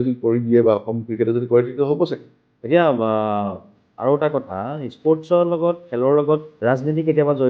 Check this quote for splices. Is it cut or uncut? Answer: cut